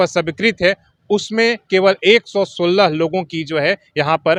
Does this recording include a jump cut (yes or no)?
no